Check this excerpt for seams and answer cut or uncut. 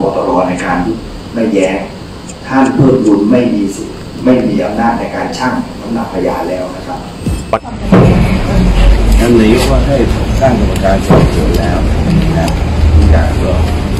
cut